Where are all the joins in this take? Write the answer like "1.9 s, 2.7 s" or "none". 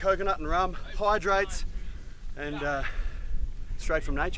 none